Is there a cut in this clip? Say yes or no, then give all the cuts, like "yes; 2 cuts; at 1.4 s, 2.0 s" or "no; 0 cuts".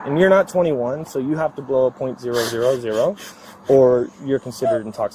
no; 0 cuts